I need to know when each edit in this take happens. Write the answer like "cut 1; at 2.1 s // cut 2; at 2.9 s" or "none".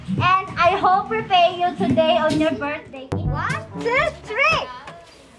cut 1; at 3.0 s